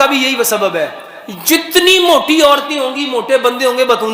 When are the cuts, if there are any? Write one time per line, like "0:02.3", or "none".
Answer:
none